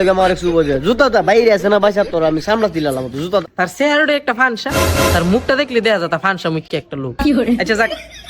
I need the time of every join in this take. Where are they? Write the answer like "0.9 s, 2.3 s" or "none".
3.4 s